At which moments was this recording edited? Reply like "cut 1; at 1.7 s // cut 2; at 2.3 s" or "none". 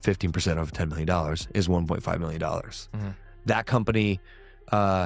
cut 1; at 3.6 s